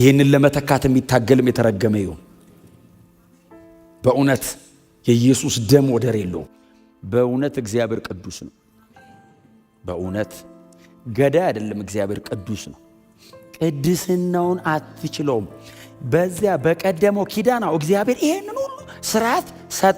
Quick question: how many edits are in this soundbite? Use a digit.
1